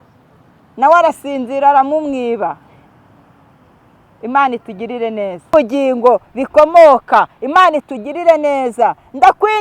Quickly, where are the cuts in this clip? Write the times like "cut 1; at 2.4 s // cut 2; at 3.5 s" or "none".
cut 1; at 5.5 s